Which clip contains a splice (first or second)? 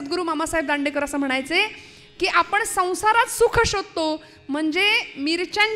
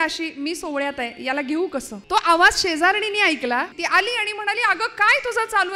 second